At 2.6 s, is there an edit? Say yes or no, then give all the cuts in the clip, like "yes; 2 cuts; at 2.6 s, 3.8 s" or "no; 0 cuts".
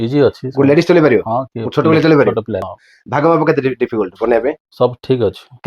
yes; 1 cut; at 2.6 s